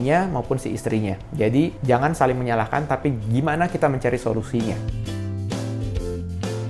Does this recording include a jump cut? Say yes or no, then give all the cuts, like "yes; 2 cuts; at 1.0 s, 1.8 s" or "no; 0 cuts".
no; 0 cuts